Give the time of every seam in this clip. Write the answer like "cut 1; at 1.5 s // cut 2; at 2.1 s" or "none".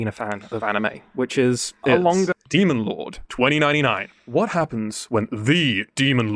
cut 1; at 2.3 s

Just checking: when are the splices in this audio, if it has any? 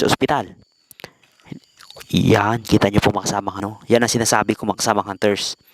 cut 1; at 3.6 s

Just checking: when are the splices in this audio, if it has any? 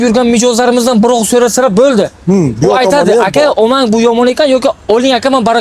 none

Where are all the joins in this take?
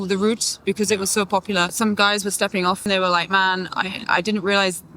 cut 1; at 1.7 s // cut 2; at 2.8 s

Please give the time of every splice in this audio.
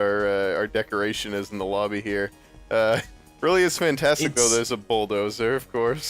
cut 1; at 1.2 s

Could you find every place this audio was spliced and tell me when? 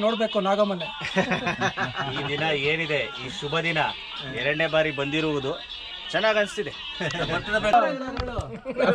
cut 1; at 7.7 s

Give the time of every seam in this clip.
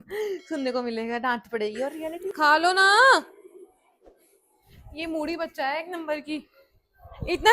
cut 1; at 2.3 s

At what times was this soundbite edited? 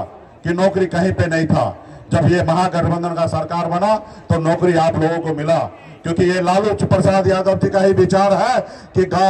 none

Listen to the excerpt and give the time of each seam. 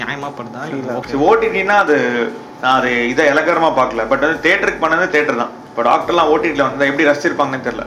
cut 1; at 1.1 s

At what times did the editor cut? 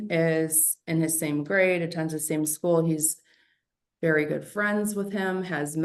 none

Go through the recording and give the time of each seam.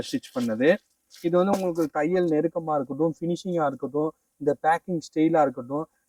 none

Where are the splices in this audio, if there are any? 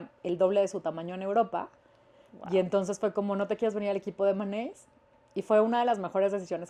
none

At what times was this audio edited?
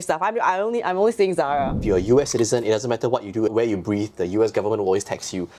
cut 1; at 1.8 s // cut 2; at 3.5 s

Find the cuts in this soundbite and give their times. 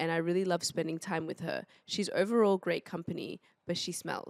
none

